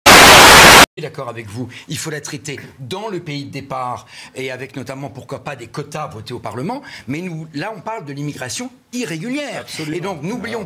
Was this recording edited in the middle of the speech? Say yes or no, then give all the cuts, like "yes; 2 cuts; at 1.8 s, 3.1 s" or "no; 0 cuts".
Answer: yes; 1 cut; at 0.9 s